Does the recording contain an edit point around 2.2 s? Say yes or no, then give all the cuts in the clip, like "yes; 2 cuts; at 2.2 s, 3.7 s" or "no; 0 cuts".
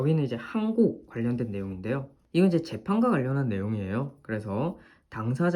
yes; 1 cut; at 2.2 s